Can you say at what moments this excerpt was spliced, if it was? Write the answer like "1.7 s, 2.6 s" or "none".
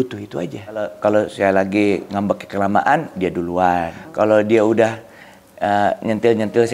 0.9 s, 4.0 s